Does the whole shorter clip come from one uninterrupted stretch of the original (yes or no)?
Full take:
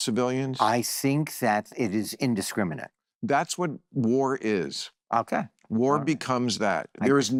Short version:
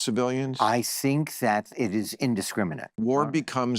no